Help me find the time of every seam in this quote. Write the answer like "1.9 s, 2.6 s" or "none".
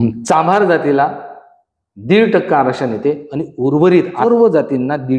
4.2 s